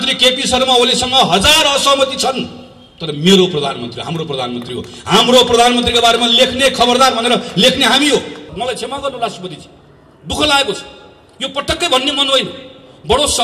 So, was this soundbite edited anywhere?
yes; 1 cut; at 8.5 s

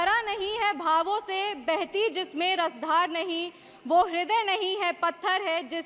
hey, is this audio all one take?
yes; 0 cuts

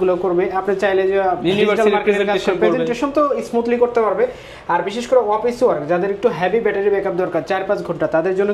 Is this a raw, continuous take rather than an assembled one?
yes; 0 cuts

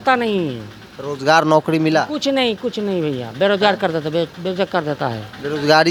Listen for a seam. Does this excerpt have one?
no; 0 cuts

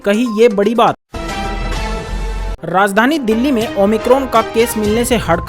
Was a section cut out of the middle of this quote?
yes; 1 cut; at 1.0 s

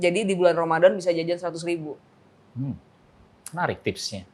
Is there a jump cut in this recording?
no; 0 cuts

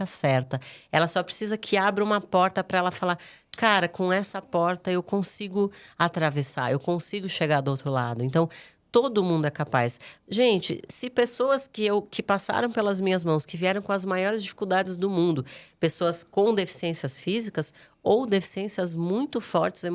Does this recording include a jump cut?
no; 0 cuts

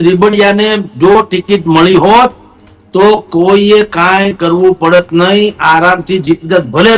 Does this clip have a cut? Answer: no; 0 cuts

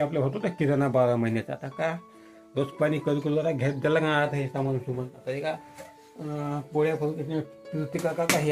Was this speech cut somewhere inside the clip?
no; 0 cuts

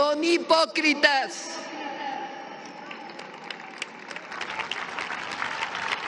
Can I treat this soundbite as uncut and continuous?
yes; 0 cuts

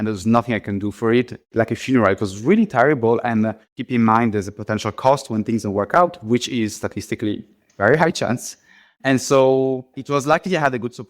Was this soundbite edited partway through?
yes; 3 cuts; at 1.4 s, 3.6 s, 10.0 s

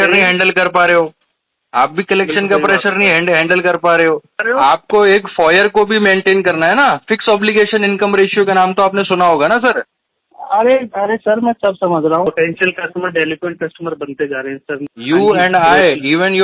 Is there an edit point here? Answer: yes; 3 cuts; at 4.4 s, 12.2 s, 14.9 s

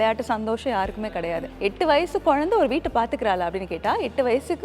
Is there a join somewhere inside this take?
yes; 1 cut; at 1.5 s

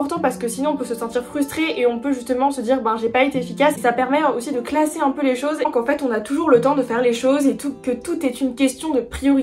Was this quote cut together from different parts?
yes; 2 cuts; at 3.8 s, 5.7 s

